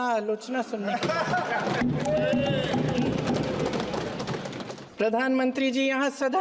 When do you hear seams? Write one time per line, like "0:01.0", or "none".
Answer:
0:04.8